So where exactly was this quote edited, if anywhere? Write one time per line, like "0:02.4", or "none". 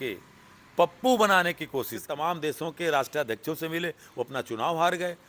0:02.1